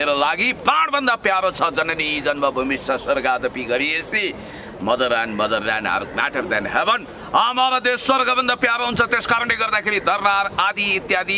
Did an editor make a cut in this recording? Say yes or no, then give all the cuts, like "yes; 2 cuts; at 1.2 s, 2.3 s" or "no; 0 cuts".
no; 0 cuts